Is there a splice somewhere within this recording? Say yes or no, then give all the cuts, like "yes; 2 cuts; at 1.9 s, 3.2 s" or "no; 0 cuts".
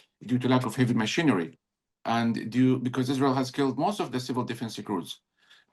no; 0 cuts